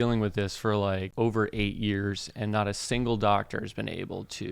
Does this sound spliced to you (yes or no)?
yes